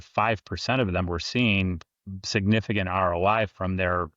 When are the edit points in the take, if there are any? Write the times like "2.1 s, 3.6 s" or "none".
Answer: none